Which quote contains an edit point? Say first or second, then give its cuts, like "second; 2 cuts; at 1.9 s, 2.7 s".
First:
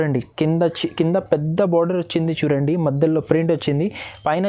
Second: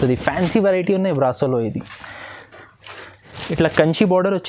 second; 1 cut; at 3.4 s